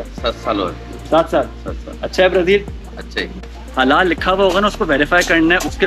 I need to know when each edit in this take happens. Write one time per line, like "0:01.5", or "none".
0:03.3